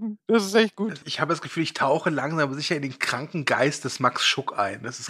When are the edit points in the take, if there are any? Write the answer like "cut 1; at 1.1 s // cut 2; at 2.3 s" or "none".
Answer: cut 1; at 1.0 s